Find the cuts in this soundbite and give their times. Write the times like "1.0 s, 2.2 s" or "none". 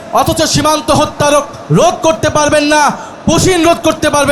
none